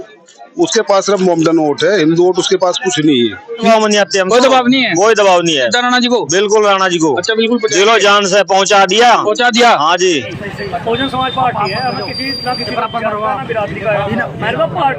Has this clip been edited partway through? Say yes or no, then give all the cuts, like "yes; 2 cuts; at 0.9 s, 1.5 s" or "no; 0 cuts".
yes; 2 cuts; at 3.7 s, 10.3 s